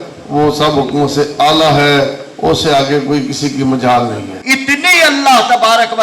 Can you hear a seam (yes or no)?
yes